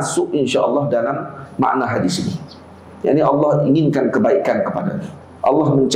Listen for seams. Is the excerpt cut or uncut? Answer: uncut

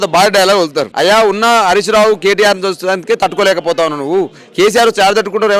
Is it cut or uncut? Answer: uncut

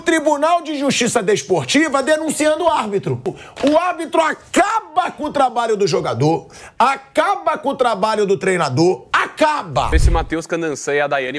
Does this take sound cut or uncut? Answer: cut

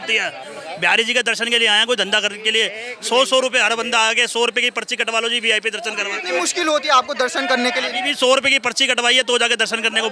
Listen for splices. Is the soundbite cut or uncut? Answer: uncut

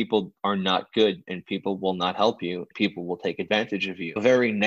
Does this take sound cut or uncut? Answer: cut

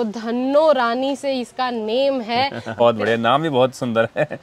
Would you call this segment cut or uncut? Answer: cut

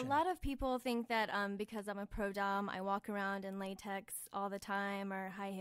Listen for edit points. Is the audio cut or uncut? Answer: uncut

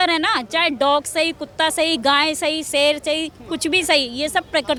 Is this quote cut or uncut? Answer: uncut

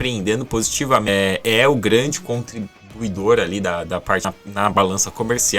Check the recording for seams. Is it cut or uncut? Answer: cut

